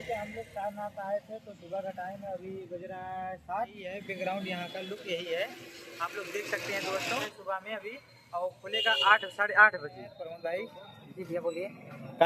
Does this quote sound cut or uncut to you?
cut